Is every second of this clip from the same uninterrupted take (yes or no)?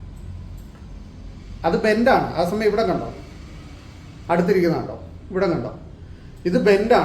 yes